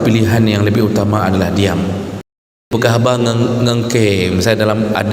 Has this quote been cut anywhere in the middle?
yes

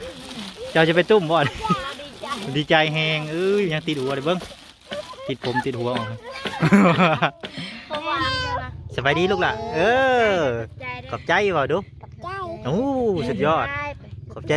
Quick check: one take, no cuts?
no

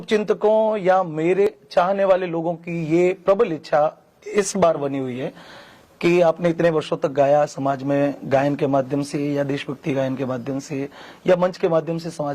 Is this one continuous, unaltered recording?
no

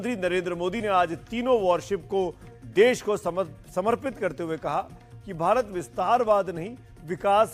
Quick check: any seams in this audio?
no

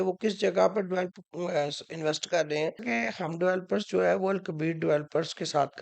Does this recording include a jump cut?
yes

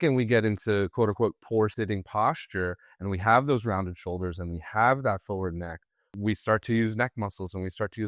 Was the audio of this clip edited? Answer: yes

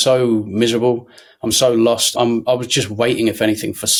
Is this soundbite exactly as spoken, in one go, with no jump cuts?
yes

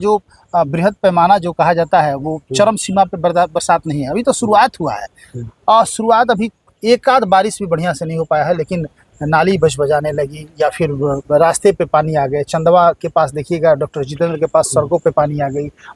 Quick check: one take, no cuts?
yes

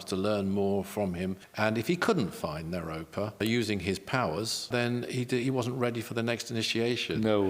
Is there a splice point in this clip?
yes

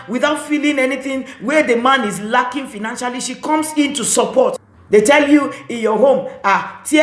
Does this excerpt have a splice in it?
yes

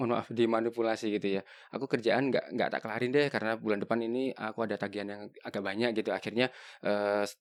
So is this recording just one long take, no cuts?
yes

